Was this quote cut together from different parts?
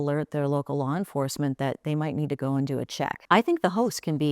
yes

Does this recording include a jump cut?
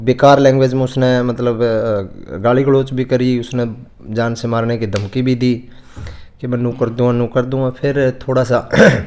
no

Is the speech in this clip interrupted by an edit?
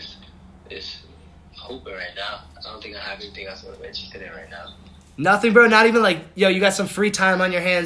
no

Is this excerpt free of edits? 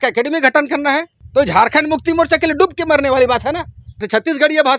no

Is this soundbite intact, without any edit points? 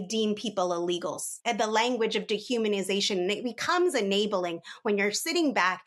no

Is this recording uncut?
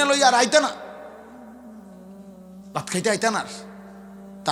yes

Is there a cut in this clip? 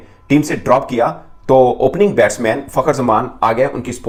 no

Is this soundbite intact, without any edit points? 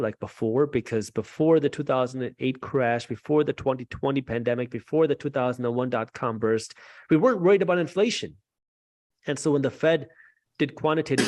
yes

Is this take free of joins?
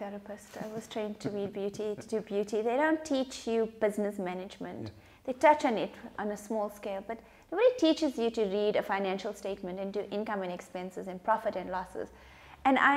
yes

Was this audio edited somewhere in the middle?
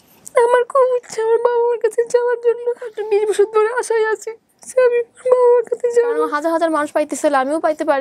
yes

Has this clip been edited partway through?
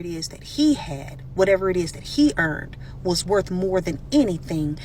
no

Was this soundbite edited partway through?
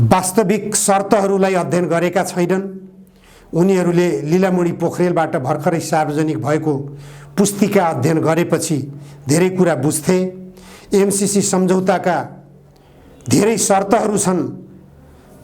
no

